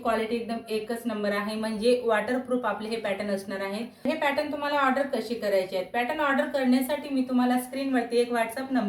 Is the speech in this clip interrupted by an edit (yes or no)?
yes